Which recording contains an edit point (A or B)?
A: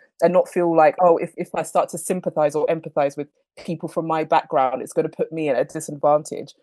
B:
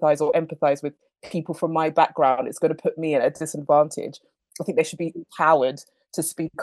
A